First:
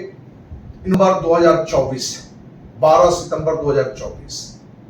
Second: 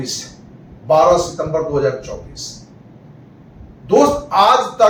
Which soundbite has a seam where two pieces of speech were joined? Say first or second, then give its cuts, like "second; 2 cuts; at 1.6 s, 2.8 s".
first; 1 cut; at 0.9 s